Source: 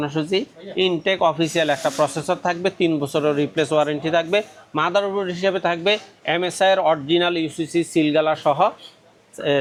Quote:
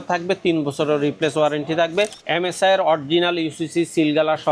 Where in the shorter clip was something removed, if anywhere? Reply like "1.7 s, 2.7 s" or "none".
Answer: 2.2 s